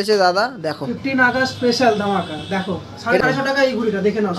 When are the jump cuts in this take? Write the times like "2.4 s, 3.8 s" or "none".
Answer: 3.2 s

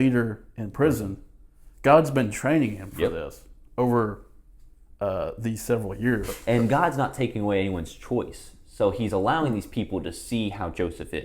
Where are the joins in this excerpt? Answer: 6.3 s

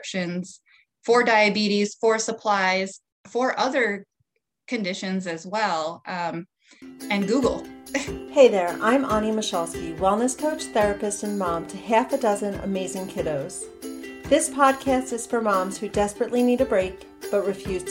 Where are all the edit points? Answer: 8.1 s

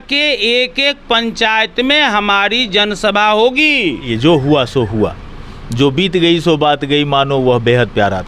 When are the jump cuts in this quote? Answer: 4.1 s

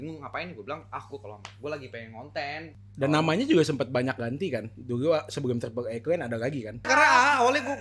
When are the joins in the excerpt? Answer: 2.8 s, 6.9 s

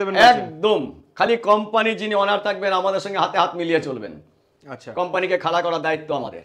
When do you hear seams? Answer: none

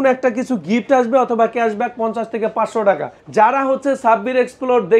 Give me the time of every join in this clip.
3.2 s

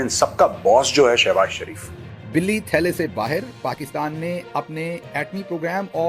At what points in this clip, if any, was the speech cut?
2.3 s

